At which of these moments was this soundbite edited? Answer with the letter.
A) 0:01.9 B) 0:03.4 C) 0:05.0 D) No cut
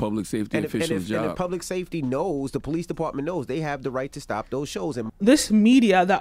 C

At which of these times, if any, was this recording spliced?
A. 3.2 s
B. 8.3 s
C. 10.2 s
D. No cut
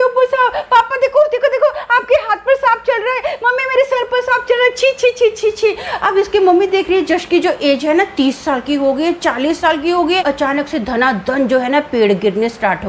C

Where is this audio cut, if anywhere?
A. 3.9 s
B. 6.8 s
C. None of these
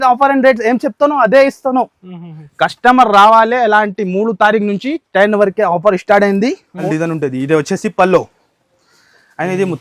B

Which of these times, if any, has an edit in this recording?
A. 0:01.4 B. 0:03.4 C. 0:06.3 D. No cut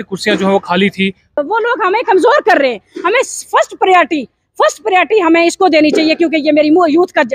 A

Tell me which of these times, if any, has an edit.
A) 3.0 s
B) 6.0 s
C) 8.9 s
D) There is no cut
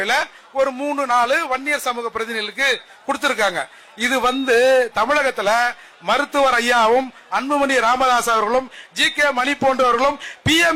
D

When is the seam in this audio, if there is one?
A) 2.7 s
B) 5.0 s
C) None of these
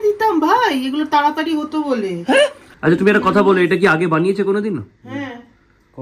A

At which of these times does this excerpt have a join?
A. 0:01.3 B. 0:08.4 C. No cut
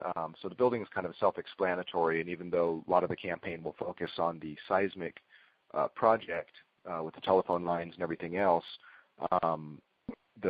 A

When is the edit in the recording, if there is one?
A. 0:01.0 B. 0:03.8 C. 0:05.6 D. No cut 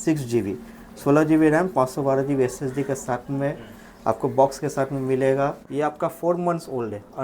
C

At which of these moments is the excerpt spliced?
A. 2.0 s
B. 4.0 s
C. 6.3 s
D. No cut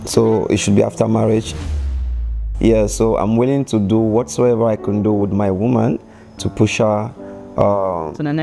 A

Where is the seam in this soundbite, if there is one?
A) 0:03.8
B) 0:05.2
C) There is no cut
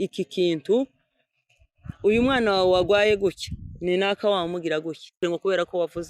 B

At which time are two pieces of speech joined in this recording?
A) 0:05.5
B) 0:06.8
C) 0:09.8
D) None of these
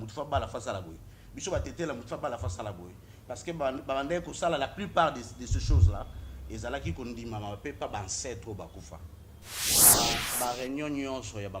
C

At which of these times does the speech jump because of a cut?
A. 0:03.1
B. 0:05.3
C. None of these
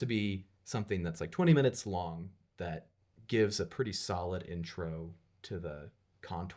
C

